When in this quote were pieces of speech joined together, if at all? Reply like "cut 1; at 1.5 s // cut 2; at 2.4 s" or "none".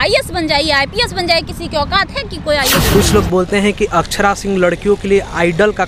cut 1; at 2.8 s